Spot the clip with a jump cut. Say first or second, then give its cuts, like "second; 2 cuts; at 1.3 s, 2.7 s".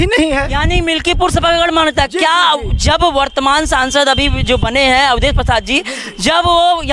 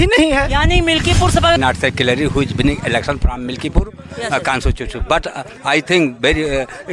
second; 1 cut; at 1.6 s